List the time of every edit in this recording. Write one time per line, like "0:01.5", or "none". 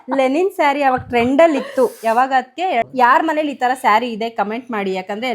0:02.9

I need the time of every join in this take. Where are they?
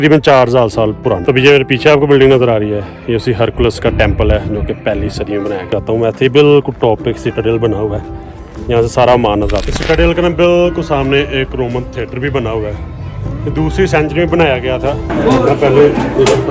0:01.2
0:05.7
0:09.6
0:15.1

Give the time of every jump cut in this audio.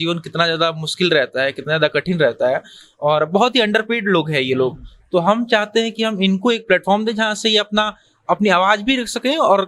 none

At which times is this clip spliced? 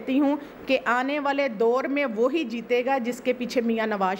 none

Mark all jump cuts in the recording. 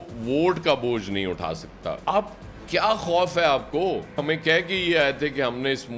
0:02.0
0:04.2

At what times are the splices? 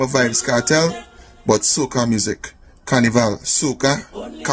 none

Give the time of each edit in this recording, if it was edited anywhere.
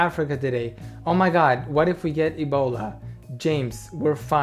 none

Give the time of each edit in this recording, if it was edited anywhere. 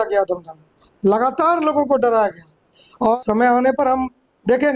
0:03.2

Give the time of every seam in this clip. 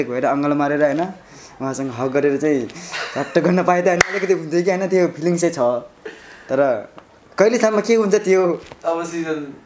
none

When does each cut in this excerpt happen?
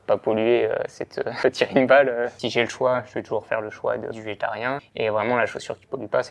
0:01.2
0:02.4
0:04.6

